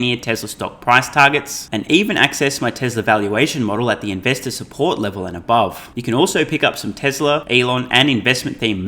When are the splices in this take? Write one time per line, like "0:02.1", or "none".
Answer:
0:05.9
0:07.4